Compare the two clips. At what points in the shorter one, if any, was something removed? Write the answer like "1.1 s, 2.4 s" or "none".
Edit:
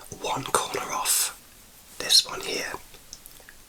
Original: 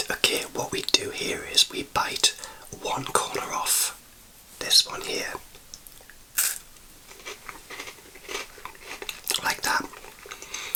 none

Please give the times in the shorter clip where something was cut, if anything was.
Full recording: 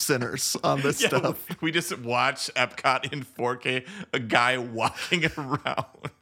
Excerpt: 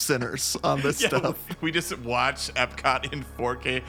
none

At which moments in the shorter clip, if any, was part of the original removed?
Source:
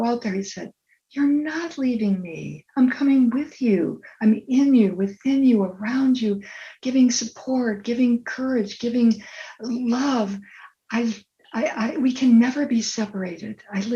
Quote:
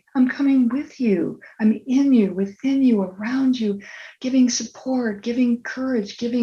none

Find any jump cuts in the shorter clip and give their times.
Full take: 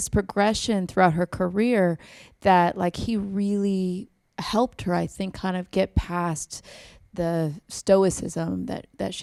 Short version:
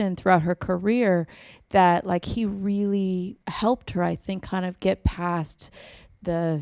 3.4 s

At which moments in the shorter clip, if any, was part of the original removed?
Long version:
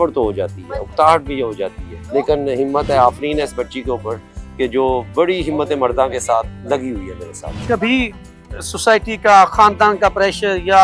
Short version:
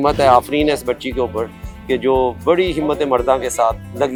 none

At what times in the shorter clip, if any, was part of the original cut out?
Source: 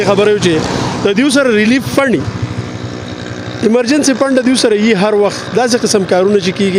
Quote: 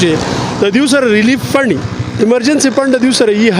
2.0 s

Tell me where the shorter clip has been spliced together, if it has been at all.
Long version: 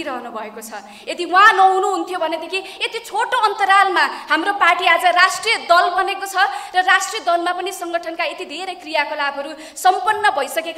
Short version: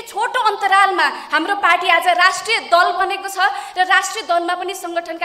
none

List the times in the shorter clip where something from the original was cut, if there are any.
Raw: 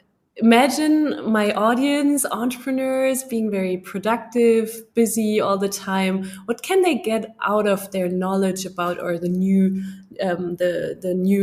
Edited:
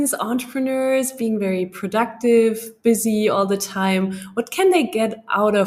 none

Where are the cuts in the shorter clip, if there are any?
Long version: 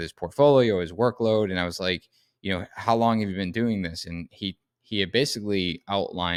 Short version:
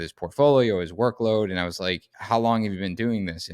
2.1 s

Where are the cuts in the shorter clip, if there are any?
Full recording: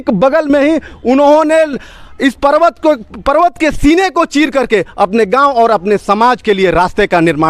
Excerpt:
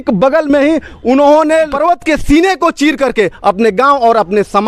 1.7 s

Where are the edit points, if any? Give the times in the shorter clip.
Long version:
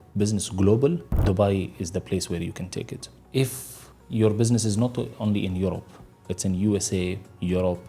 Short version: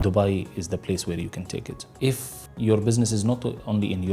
2.0 s

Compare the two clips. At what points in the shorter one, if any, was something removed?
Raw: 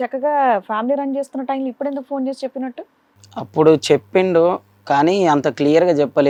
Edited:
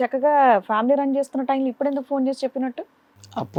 none

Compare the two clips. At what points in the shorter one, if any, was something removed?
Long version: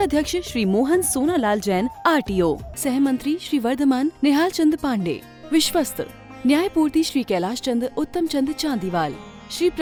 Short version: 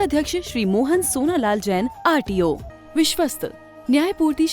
2.7 s

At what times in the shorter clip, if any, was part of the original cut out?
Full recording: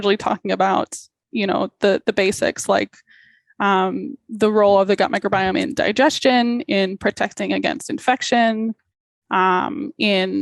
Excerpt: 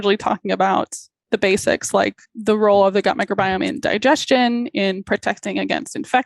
1.3 s, 2.3 s

